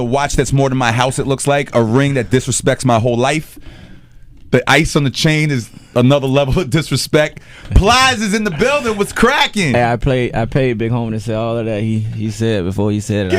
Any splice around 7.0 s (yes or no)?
no